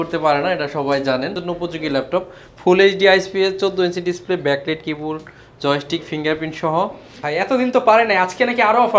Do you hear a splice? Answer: yes; 2 cuts; at 1.4 s, 7.1 s

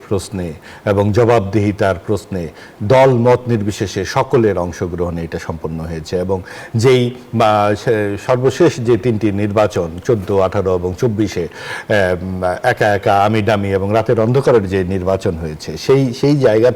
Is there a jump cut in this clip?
no; 0 cuts

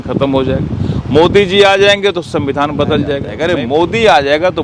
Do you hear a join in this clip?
yes; 1 cut; at 3.3 s

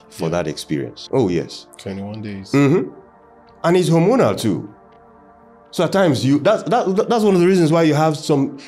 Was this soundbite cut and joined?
yes; 1 cut; at 1.0 s

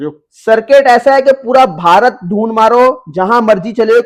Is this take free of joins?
yes; 0 cuts

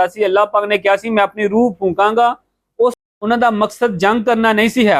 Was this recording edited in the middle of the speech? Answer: yes; 1 cut; at 3.0 s

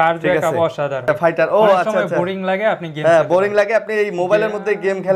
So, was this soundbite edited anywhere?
yes; 1 cut; at 1.0 s

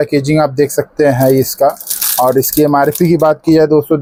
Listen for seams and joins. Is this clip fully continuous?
yes; 0 cuts

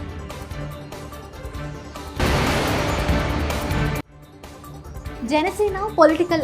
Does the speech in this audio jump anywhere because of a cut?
no; 0 cuts

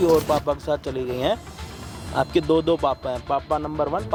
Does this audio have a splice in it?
no; 0 cuts

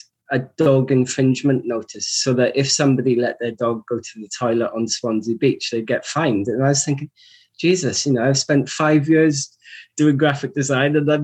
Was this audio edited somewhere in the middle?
no; 0 cuts

